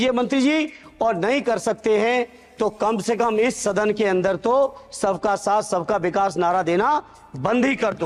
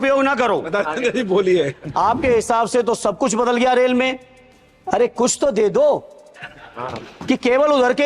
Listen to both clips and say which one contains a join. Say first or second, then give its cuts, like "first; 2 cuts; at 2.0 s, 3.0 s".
second; 1 cut; at 1.8 s